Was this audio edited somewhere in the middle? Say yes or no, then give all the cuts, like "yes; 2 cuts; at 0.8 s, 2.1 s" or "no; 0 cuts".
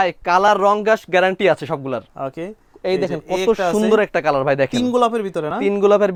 no; 0 cuts